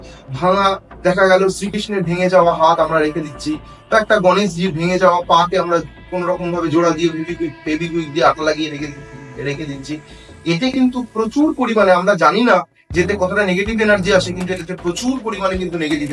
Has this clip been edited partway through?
no; 0 cuts

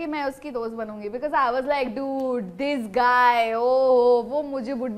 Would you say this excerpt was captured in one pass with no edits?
yes; 0 cuts

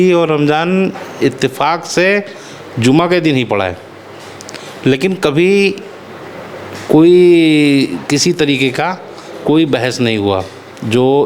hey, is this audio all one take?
yes; 0 cuts

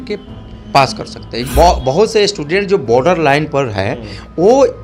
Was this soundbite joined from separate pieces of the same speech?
yes; 1 cut; at 1.4 s

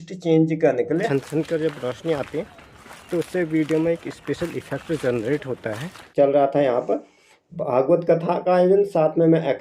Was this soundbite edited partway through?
yes; 2 cuts; at 1.1 s, 6.0 s

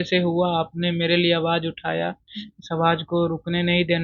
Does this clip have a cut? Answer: no; 0 cuts

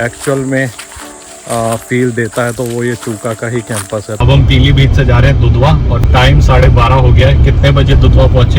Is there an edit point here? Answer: yes; 2 cuts; at 4.1 s, 6.0 s

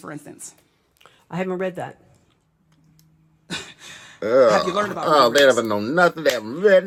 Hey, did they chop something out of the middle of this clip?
no; 0 cuts

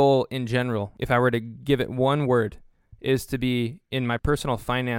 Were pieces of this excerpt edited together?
yes; 2 cuts; at 0.9 s, 4.2 s

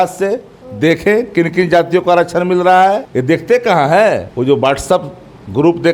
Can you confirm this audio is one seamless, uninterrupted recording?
no; 2 cuts; at 3.1 s, 4.3 s

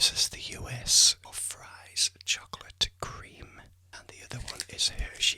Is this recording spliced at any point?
yes; 2 cuts; at 1.2 s, 3.9 s

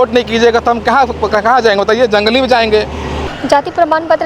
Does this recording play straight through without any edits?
no; 1 cut; at 3.2 s

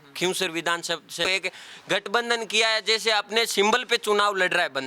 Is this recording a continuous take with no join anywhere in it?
no; 1 cut; at 1.2 s

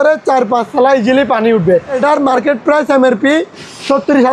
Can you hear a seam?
yes; 1 cut; at 2.0 s

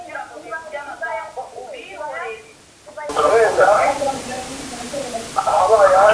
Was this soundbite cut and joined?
yes; 1 cut; at 3.1 s

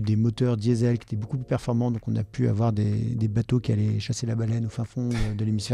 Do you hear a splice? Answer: no; 0 cuts

